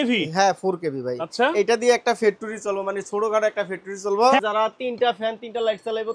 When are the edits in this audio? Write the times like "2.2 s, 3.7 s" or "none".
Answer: 4.4 s